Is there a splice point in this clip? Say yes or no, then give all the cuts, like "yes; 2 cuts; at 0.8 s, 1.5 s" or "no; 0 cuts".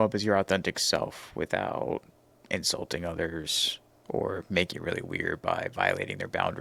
no; 0 cuts